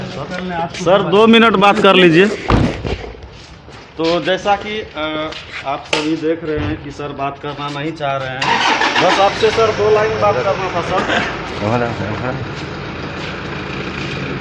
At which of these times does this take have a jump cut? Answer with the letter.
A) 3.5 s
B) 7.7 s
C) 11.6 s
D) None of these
D